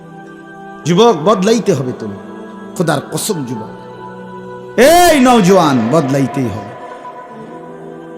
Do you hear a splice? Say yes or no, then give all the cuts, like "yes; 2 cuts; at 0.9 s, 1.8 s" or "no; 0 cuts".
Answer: yes; 1 cut; at 1.0 s